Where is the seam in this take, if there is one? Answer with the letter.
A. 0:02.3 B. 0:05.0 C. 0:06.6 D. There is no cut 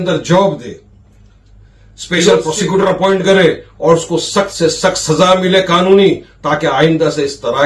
A